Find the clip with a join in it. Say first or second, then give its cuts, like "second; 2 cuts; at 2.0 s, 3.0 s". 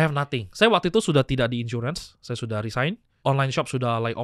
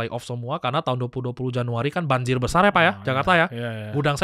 first; 1 cut; at 3.1 s